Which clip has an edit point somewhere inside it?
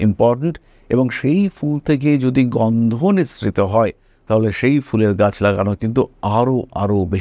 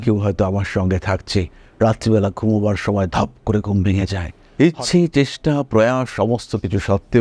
second; 1 cut; at 4.4 s

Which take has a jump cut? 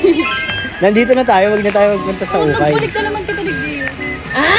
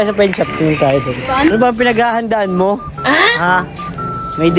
second; 1 cut; at 1.5 s

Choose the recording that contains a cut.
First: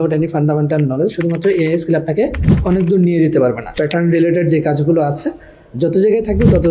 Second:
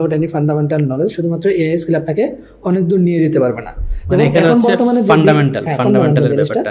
first; 1 cut; at 3.8 s

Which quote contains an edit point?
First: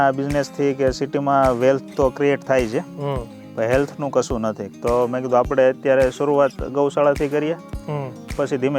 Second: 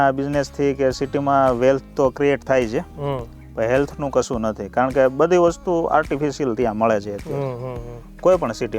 first; 1 cut; at 4.6 s

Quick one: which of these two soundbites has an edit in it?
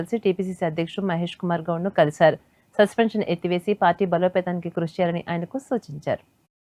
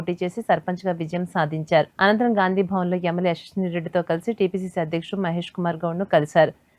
second; 1 cut; at 1.9 s

